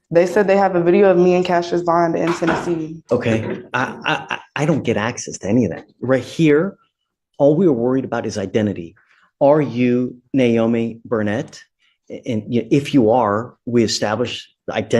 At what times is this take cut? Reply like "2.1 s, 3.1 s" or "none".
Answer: 3.0 s